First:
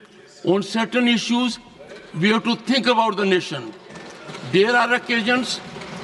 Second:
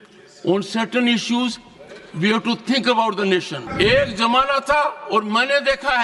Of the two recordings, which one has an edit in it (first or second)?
second